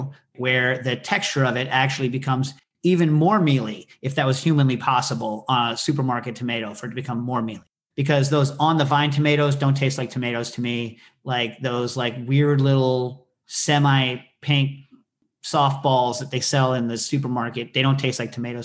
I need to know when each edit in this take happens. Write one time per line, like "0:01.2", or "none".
0:07.6